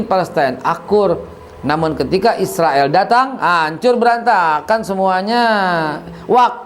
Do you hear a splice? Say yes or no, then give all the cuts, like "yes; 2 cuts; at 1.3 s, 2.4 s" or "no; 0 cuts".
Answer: no; 0 cuts